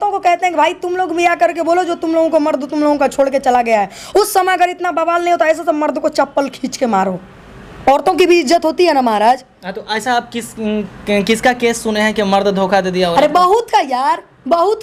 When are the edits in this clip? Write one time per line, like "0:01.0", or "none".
none